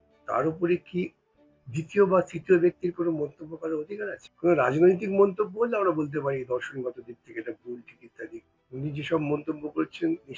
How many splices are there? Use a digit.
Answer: 2